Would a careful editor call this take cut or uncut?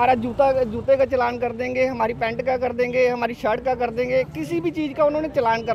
uncut